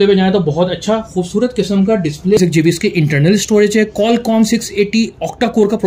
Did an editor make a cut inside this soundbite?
yes; 1 cut; at 2.4 s

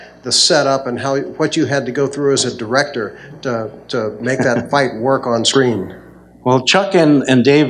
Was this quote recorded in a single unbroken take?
yes; 0 cuts

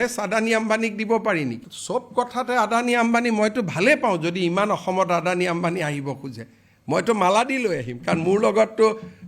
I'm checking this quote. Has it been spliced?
yes; 1 cut; at 1.7 s

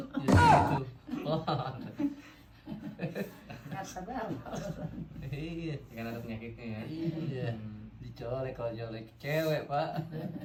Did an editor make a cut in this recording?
no; 0 cuts

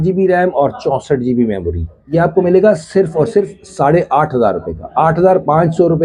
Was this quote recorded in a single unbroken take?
no; 1 cut; at 2.1 s

